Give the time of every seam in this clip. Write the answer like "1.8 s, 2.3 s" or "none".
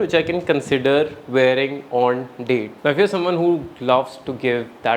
2.7 s